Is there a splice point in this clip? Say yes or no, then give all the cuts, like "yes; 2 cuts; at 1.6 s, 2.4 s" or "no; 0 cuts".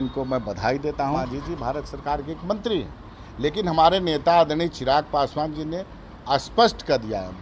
yes; 1 cut; at 1.2 s